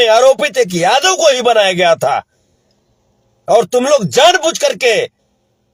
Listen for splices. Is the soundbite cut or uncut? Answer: uncut